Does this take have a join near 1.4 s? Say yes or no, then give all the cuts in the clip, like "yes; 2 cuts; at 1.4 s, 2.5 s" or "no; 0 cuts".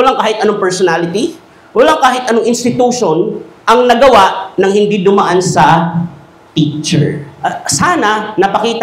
no; 2 cuts; at 3.5 s, 7.3 s